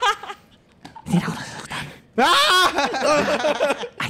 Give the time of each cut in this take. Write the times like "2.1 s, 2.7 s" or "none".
2.1 s